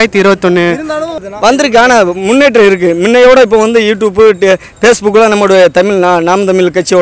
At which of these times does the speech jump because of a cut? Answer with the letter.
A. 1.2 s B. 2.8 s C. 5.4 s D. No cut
A